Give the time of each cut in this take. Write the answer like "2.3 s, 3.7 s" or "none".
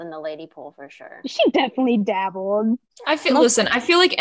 2.9 s